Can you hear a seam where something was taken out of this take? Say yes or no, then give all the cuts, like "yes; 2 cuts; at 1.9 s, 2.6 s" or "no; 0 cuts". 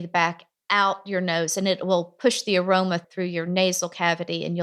no; 0 cuts